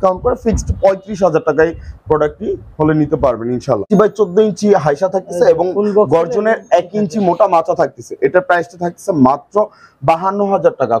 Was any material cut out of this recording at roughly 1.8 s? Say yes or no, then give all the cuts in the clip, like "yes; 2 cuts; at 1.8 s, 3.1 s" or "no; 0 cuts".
no; 1 cut; at 3.9 s